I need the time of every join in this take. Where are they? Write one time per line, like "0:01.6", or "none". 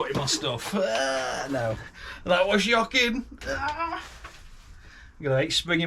0:01.9